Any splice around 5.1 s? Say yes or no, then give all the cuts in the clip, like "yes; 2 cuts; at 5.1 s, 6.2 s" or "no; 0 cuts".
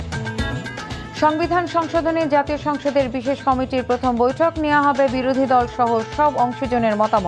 no; 0 cuts